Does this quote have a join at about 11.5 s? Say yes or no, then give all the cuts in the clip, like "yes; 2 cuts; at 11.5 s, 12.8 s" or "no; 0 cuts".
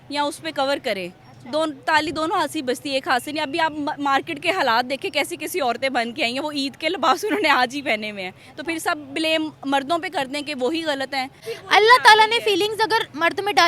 yes; 1 cut; at 11.5 s